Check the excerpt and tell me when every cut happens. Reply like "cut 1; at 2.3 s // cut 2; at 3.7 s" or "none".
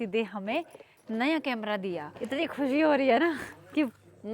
cut 1; at 2.1 s

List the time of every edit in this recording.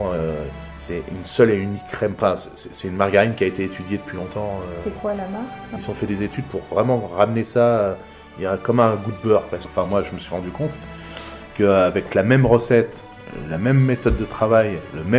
cut 1; at 2.2 s // cut 2; at 5.6 s // cut 3; at 9.6 s

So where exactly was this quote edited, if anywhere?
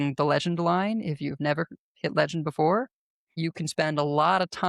cut 1; at 3.3 s

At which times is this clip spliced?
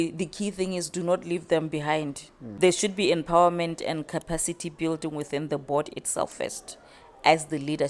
cut 1; at 2.4 s

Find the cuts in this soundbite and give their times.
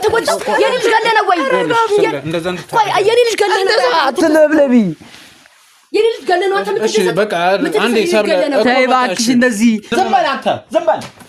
cut 1; at 9.9 s

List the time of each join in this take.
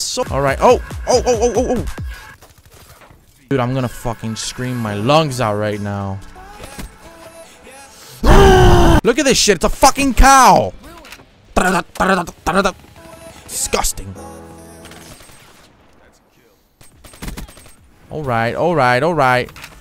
cut 1; at 9.0 s // cut 2; at 16.8 s

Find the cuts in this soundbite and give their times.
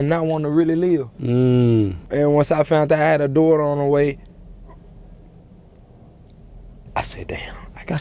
none

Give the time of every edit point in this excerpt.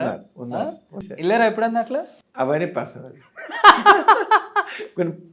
cut 1; at 1.1 s // cut 2; at 2.2 s

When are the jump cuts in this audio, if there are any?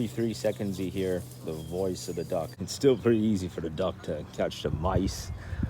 cut 1; at 2.6 s

